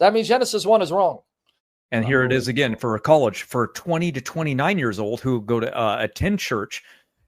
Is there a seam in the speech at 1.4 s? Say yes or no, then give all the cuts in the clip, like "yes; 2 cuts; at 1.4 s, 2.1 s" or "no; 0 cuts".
yes; 1 cut; at 1.4 s